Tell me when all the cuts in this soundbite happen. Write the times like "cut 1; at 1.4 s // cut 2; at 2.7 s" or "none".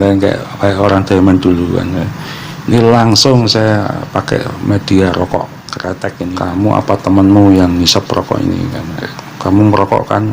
cut 1; at 6.3 s